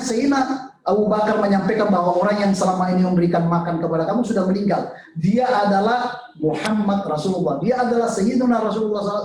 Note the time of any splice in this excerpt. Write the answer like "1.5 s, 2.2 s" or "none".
none